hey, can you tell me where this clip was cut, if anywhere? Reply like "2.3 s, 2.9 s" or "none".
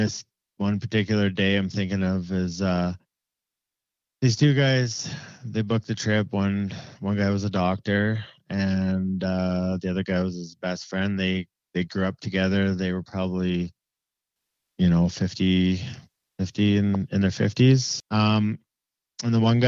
17.9 s